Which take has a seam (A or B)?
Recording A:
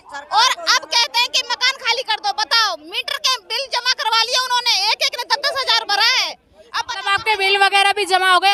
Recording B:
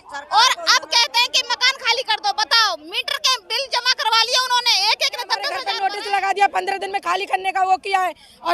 B